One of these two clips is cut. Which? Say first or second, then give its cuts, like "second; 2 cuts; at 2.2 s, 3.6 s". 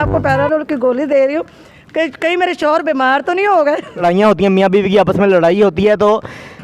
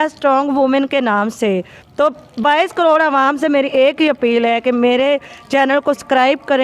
first; 1 cut; at 4.0 s